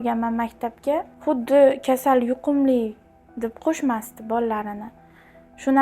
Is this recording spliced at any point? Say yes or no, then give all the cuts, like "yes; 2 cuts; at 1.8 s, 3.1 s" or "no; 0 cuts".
yes; 2 cuts; at 1.1 s, 3.6 s